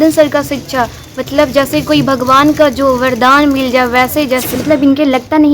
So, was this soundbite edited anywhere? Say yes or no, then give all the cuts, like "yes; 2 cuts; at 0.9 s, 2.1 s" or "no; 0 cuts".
yes; 1 cut; at 4.5 s